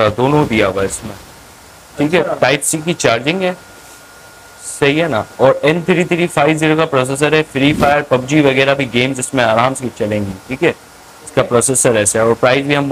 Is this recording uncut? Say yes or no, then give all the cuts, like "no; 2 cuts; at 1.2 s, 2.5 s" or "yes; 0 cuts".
yes; 0 cuts